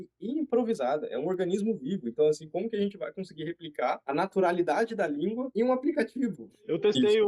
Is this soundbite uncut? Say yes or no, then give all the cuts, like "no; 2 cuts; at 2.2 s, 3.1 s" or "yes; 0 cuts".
yes; 0 cuts